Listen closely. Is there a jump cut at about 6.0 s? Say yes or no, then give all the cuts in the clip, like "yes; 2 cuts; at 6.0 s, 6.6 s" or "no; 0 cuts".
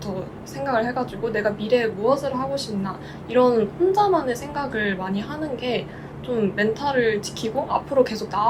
no; 0 cuts